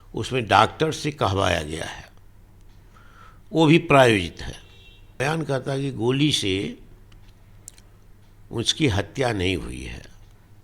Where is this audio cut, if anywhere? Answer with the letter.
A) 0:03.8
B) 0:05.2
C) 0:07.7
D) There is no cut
B